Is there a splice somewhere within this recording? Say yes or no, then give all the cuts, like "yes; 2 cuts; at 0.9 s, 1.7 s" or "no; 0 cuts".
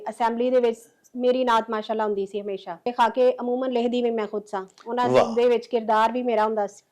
yes; 1 cut; at 2.9 s